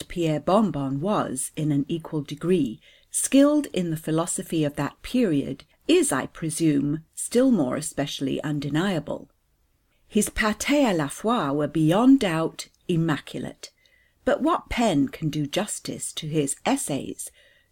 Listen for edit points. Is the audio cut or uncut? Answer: cut